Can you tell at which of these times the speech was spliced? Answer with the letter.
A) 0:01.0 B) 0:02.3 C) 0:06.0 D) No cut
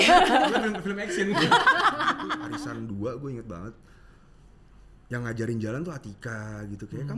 B